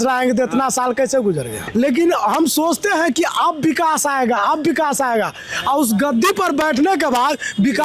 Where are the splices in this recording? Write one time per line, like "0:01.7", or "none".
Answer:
0:01.7